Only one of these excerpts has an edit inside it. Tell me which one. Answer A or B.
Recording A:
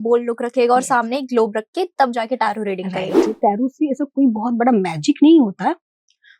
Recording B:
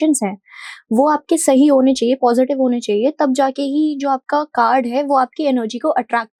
A